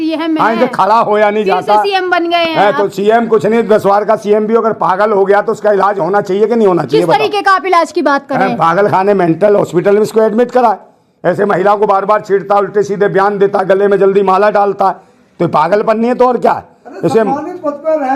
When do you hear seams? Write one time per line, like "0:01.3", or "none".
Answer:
none